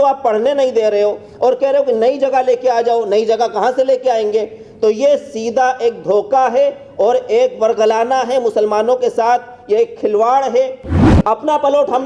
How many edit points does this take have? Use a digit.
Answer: 1